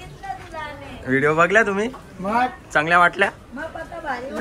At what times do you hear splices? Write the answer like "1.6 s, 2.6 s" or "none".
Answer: none